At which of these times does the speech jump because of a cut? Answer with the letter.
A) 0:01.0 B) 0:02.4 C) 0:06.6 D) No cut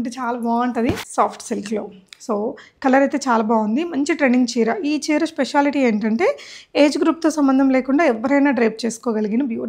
A